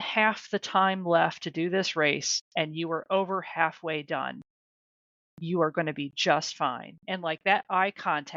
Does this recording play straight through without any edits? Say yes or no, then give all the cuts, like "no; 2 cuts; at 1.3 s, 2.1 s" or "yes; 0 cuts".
yes; 0 cuts